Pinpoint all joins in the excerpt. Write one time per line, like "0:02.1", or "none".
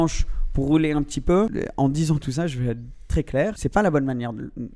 0:01.5
0:03.6